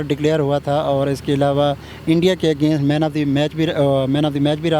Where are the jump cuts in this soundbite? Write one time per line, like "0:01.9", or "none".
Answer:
none